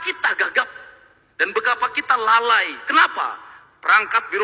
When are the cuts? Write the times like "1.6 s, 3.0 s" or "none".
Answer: none